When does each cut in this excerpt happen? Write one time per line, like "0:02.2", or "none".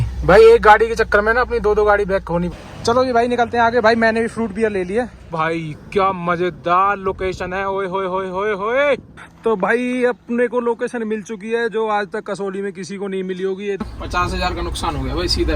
0:02.5
0:05.2
0:09.2
0:13.9